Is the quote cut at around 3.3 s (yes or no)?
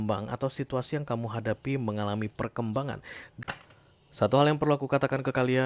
yes